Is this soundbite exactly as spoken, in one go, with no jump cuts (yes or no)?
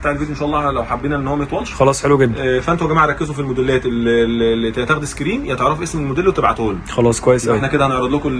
yes